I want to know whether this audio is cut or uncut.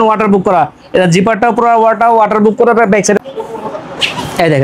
cut